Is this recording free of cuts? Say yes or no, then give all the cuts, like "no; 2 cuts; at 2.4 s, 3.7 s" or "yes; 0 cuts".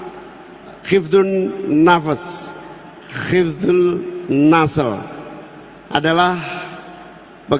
yes; 0 cuts